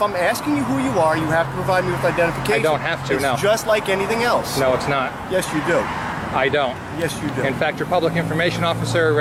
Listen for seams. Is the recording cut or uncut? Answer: uncut